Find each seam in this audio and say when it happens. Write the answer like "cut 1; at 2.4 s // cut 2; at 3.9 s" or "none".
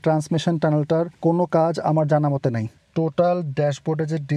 cut 1; at 1.1 s // cut 2; at 2.7 s